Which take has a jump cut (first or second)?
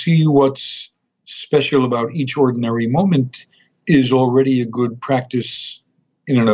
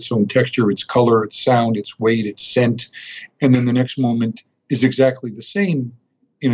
second